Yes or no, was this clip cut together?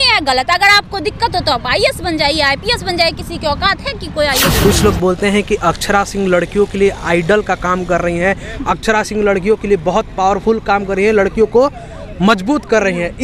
yes